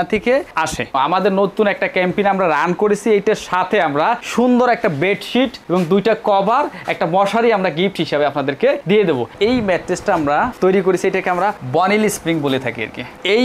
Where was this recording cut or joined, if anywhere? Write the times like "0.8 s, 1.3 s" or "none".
1.0 s, 9.3 s

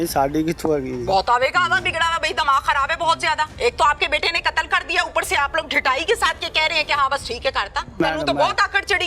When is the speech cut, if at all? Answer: 3.5 s, 8.0 s

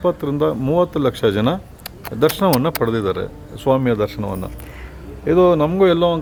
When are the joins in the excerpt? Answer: none

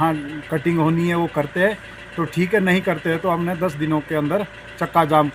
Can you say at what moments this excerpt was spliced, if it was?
none

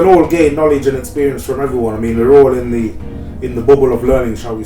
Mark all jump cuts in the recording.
none

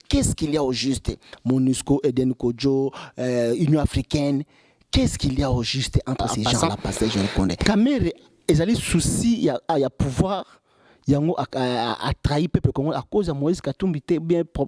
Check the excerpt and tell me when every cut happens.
7.6 s

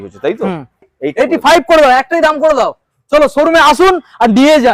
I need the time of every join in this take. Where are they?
1.0 s

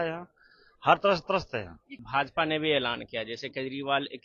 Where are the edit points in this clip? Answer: 2.0 s

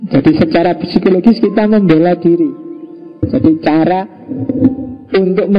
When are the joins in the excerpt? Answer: 3.2 s

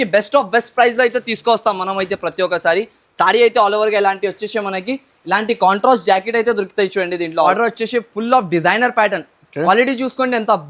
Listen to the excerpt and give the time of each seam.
7.5 s

